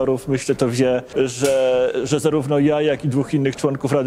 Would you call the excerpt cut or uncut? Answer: cut